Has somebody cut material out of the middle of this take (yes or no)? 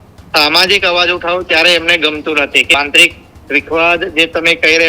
yes